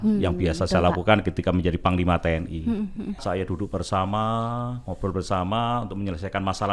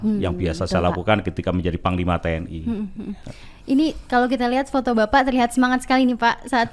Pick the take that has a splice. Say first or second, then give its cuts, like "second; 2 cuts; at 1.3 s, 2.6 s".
first; 1 cut; at 3.2 s